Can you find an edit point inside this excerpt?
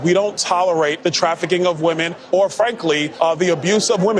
no; 0 cuts

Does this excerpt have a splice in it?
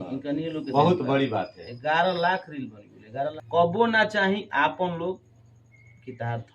yes; 1 cut; at 3.3 s

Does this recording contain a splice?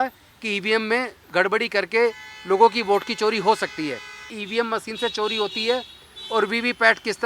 yes; 1 cut; at 4.4 s

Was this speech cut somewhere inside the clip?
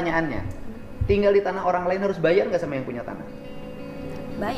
no; 0 cuts

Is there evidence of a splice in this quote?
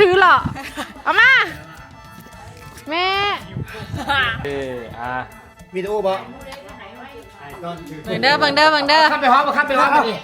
yes; 1 cut; at 4.5 s

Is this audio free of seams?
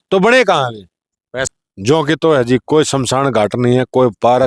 no; 1 cut; at 1.5 s

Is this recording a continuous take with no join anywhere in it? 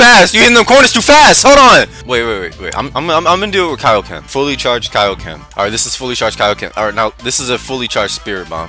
no; 1 cut; at 2.0 s

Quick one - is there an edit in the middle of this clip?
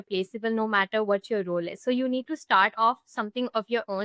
no; 0 cuts

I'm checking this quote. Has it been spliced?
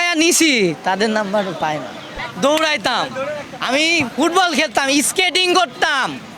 yes; 1 cut; at 2.2 s

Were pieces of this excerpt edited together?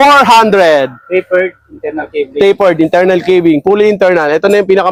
no; 0 cuts

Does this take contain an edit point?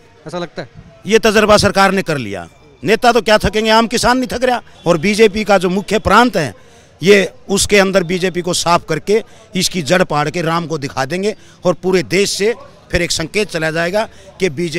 yes; 1 cut; at 4.7 s

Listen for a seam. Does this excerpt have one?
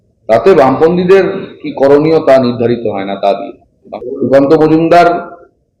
yes; 1 cut; at 3.9 s

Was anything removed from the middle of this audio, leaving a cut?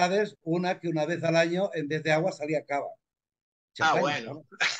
no; 0 cuts

